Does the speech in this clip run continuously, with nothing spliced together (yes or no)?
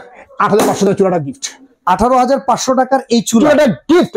yes